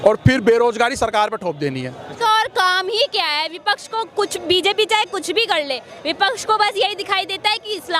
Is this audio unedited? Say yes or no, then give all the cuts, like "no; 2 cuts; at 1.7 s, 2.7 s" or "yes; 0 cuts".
no; 1 cut; at 2.1 s